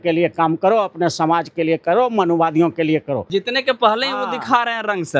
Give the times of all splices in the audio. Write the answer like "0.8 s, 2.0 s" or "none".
3.2 s